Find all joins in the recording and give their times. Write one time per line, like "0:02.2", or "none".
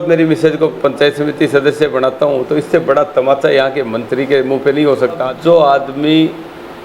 0:05.3